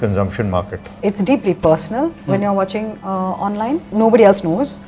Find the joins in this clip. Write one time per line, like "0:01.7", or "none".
0:00.9
0:03.9